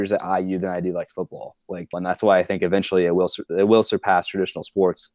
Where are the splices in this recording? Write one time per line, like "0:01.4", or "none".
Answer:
0:01.9